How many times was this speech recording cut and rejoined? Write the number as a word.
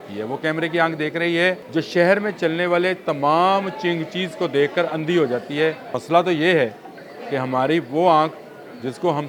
two